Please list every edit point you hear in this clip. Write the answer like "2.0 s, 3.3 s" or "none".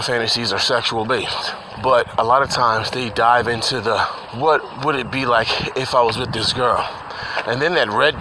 1.6 s, 4.2 s